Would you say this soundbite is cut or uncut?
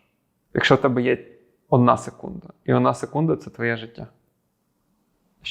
uncut